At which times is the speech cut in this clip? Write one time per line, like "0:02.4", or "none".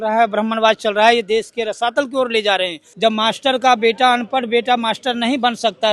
0:02.8